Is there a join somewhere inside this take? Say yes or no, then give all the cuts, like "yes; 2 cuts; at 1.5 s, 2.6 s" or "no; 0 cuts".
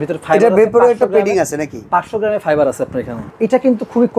yes; 1 cut; at 3.2 s